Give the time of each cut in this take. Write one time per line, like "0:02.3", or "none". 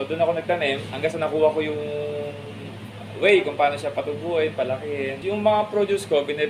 0:00.9
0:05.2